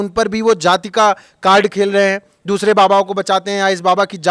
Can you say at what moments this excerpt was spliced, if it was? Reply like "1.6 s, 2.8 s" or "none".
none